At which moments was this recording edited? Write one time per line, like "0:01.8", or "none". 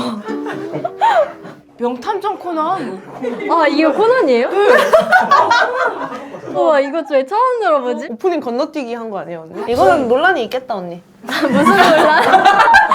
0:06.5
0:09.6